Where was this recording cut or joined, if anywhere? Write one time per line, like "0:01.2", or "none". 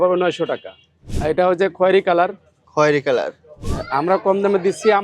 0:01.1
0:03.6